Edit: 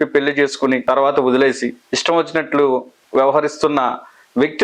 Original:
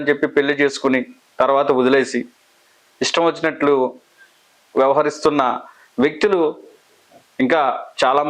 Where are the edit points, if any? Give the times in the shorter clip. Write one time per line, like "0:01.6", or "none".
0:00.8
0:01.9
0:03.0